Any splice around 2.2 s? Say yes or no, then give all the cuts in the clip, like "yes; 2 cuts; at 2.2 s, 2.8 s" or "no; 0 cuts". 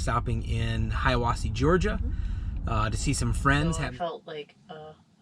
no; 1 cut; at 3.8 s